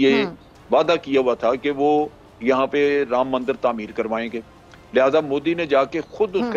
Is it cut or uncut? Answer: uncut